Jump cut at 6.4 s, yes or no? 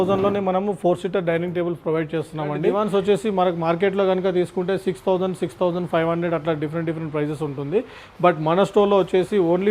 no